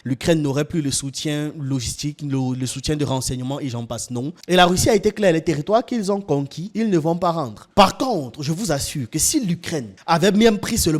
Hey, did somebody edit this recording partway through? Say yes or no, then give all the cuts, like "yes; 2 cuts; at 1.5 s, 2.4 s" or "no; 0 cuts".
yes; 2 cuts; at 4.3 s, 7.6 s